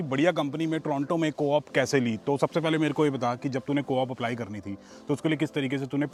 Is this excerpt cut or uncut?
uncut